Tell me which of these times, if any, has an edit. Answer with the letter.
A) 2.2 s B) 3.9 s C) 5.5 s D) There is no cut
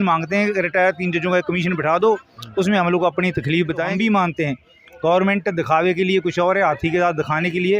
B